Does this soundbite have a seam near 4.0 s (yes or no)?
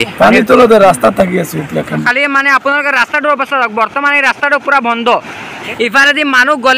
no